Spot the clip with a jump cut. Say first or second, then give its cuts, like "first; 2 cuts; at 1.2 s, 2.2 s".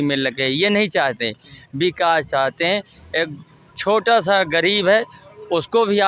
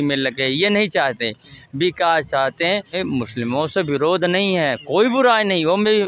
second; 1 cut; at 3.0 s